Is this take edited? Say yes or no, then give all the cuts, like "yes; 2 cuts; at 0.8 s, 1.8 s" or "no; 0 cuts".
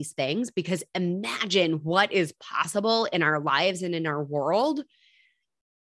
no; 0 cuts